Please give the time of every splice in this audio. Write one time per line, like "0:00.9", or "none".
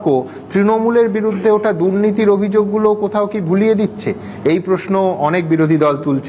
none